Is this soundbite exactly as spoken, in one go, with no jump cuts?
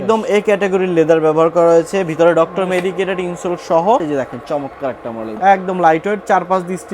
no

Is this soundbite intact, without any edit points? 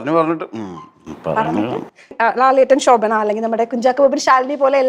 no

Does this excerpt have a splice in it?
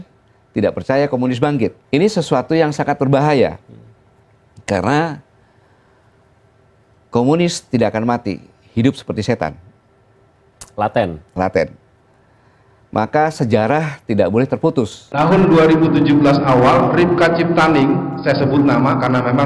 yes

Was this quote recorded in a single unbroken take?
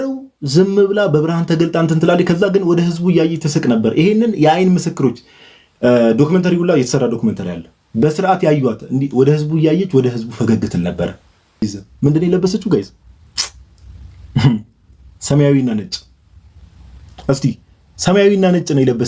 no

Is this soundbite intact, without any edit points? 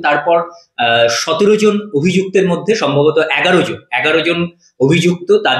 yes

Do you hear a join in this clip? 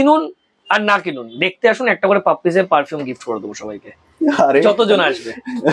no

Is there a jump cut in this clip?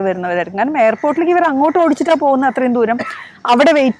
no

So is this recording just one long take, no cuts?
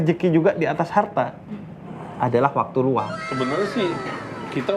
no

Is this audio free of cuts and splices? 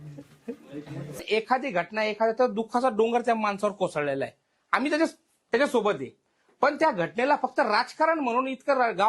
no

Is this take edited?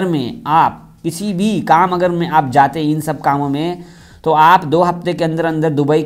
no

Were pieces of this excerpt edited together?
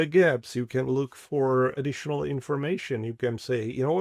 yes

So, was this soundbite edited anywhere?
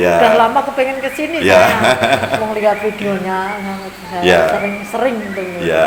no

